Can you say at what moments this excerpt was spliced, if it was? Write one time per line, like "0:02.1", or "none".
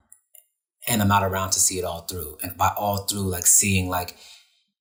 none